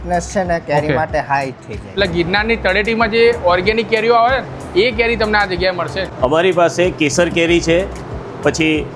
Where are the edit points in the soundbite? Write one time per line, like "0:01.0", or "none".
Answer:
0:01.9
0:06.0